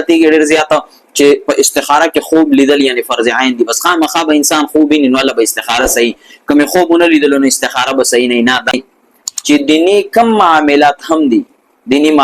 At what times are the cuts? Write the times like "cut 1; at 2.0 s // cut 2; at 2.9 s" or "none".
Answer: cut 1; at 8.7 s